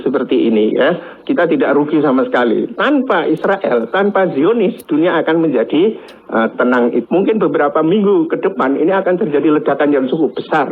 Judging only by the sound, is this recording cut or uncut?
cut